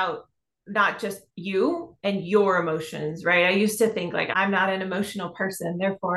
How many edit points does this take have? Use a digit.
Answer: 2